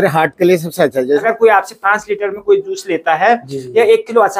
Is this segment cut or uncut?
cut